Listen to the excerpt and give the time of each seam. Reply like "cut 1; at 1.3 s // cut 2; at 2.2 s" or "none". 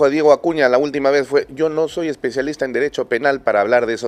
none